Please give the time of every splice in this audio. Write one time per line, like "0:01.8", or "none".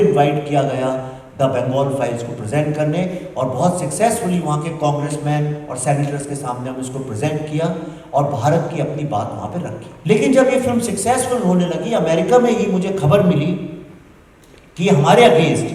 0:09.9